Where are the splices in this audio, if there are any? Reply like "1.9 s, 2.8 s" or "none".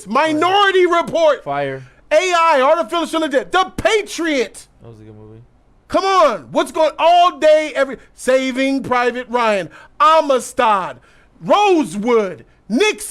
none